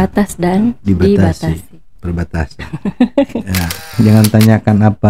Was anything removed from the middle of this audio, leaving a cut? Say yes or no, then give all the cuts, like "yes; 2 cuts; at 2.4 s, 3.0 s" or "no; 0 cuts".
yes; 1 cut; at 3.9 s